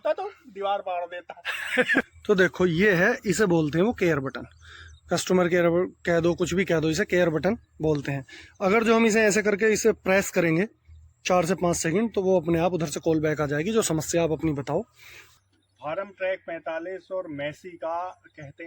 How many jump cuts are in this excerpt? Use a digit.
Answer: 2